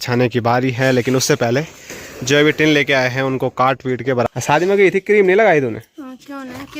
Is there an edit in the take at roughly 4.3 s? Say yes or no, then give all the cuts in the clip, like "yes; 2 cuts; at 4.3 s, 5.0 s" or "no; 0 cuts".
yes; 1 cut; at 4.3 s